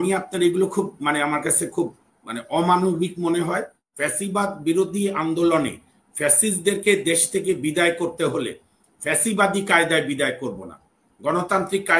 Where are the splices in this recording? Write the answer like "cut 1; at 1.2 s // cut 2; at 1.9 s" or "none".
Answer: cut 1; at 3.8 s